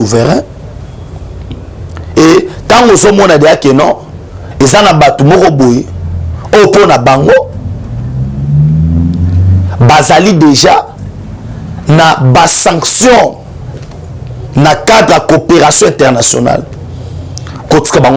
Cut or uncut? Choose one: uncut